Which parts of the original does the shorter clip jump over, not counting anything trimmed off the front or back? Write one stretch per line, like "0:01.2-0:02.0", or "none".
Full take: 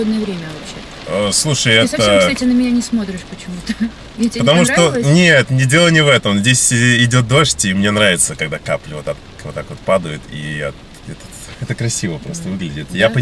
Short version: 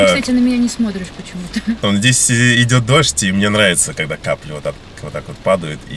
0:03.9-0:06.2

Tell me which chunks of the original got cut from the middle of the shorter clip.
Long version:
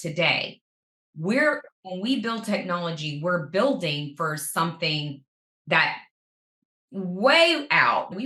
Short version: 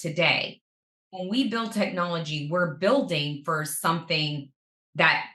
0:01.0-0:01.7

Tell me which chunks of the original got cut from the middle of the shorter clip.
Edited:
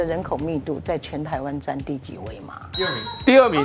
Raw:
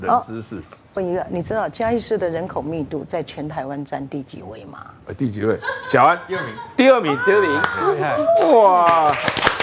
0:05.0-0:06.3

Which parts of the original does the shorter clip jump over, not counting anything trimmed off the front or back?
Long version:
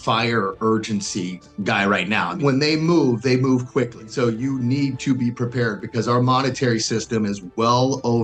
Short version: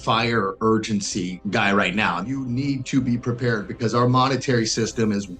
0:01.4-0:01.5
0:02.4-0:04.4

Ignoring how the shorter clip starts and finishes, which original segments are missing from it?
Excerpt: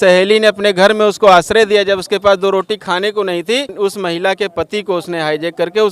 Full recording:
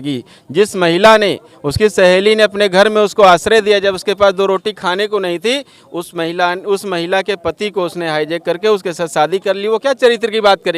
0:05.7-0:06.6

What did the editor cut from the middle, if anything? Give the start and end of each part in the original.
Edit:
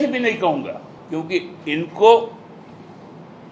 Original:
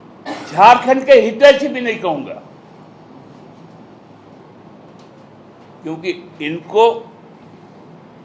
0:02.5-0:05.7

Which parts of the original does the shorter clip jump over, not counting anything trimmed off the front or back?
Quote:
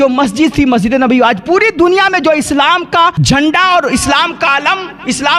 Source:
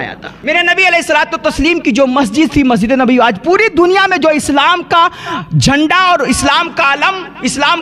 0:05.2-0:05.5

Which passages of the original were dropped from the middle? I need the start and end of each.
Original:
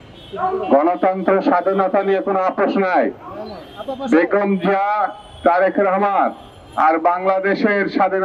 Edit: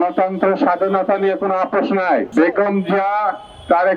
0:03.1-0:04.0

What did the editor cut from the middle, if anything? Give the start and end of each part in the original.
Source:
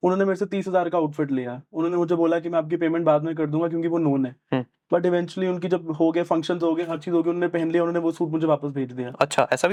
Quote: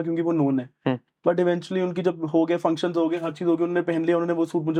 none

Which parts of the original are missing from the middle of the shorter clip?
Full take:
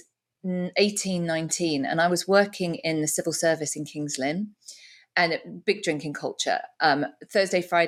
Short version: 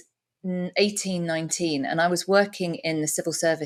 none

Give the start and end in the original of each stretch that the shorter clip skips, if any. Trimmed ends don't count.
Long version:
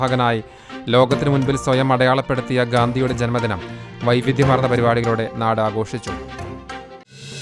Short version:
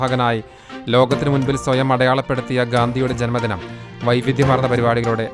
none

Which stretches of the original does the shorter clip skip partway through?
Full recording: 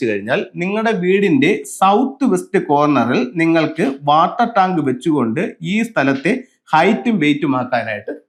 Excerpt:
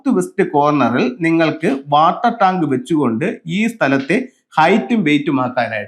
none

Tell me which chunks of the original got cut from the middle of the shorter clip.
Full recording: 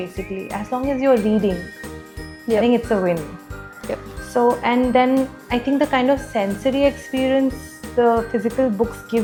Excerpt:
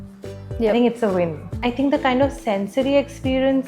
0:03.4-0:05.4

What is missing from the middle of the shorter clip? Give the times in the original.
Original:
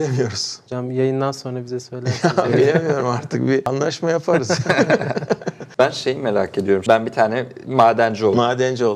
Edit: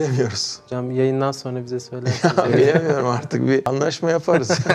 none

